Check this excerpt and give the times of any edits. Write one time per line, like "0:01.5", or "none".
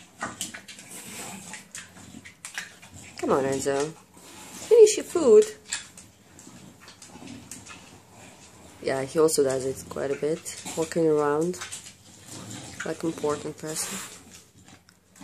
none